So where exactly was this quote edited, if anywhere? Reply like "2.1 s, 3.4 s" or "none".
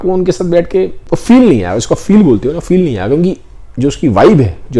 1.0 s